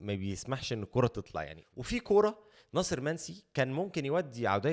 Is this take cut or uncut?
cut